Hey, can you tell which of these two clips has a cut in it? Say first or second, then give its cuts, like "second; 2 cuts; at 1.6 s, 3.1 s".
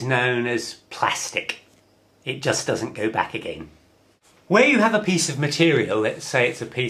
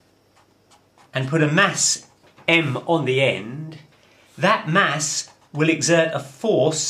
second; 1 cut; at 1.4 s